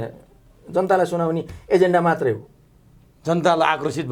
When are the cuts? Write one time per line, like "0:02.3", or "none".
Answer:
none

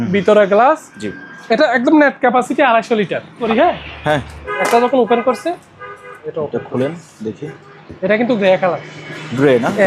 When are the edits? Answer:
0:03.4

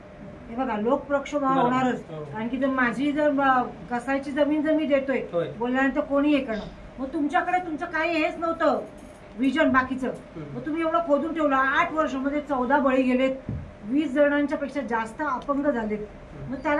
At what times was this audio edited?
none

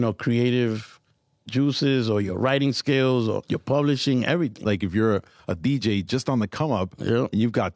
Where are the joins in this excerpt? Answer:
0:03.4
0:04.6

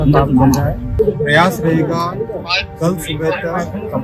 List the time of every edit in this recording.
0:00.9

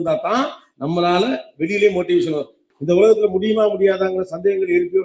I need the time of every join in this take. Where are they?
0:02.7

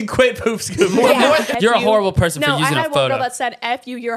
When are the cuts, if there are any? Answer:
0:01.5

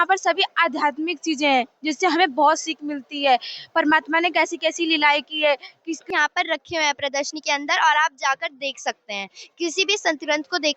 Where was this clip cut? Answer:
0:06.0

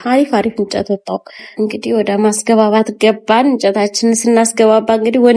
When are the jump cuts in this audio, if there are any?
0:01.4

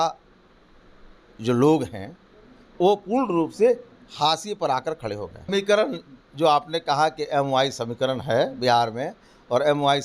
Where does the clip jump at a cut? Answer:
0:05.5

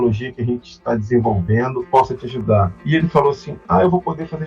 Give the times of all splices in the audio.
0:01.8
0:02.8

